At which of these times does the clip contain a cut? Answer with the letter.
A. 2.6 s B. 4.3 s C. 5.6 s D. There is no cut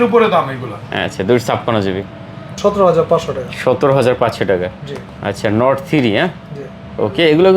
A